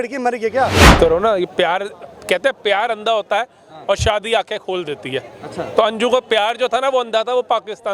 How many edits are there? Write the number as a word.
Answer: one